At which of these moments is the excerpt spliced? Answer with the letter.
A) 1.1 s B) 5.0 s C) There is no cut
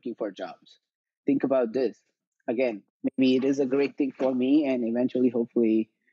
C